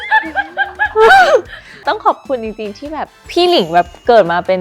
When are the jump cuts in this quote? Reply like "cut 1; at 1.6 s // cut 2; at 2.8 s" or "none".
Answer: cut 1; at 1.8 s // cut 2; at 3.2 s